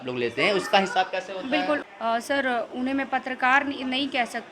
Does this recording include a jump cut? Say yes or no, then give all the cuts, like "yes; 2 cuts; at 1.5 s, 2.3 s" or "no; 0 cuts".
yes; 1 cut; at 1.8 s